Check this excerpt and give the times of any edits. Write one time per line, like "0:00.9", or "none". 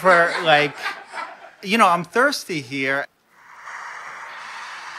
0:03.1